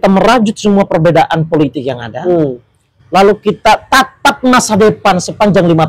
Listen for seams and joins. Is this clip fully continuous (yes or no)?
yes